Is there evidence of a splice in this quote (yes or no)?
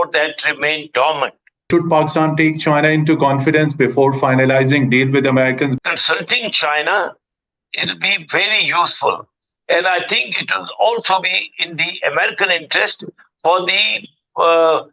yes